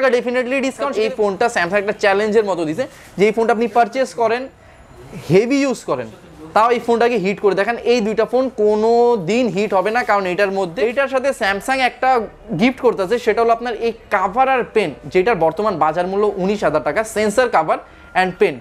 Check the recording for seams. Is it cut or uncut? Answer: cut